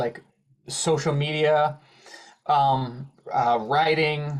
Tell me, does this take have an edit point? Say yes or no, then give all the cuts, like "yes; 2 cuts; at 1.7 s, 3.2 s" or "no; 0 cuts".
no; 0 cuts